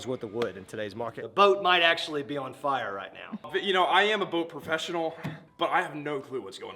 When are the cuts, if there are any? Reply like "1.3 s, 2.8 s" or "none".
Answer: 1.2 s, 3.5 s